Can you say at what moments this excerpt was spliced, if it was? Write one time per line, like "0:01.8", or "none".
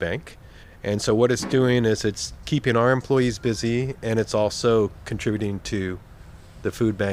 none